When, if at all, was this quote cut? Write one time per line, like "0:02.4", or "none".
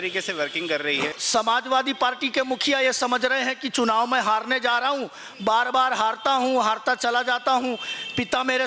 0:01.2